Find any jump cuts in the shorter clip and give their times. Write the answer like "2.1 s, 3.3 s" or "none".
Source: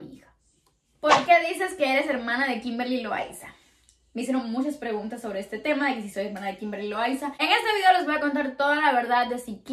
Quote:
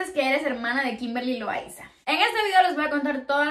2.0 s